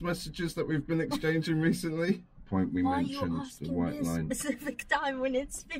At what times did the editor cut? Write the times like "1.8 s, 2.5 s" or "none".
2.4 s